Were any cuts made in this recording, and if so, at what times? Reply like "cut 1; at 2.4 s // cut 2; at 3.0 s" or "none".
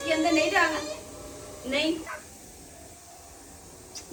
none

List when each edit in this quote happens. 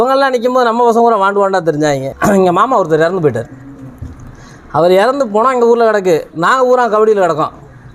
cut 1; at 2.1 s

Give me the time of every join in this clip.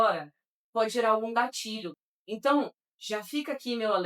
cut 1; at 1.9 s

